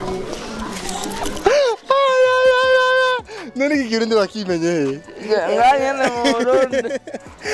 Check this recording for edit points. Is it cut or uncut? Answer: uncut